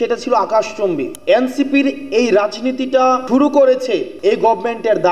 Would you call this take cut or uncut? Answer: cut